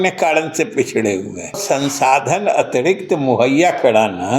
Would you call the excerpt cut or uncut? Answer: cut